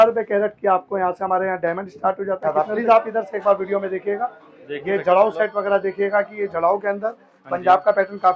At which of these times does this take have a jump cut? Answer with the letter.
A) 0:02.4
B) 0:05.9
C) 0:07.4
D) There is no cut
A